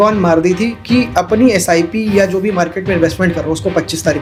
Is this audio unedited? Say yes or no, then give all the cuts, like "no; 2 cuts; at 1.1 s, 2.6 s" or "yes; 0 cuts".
yes; 0 cuts